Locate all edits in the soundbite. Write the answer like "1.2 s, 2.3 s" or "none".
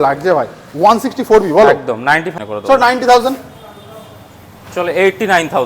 2.3 s